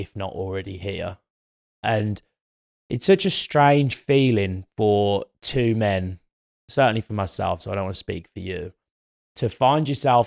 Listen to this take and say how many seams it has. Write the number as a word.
zero